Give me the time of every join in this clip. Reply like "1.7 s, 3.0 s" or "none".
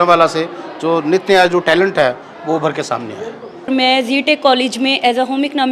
none